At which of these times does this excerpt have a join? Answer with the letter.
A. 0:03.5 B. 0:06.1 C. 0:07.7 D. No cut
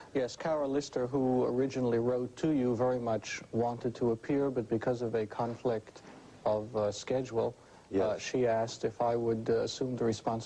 C